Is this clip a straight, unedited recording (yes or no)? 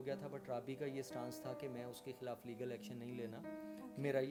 yes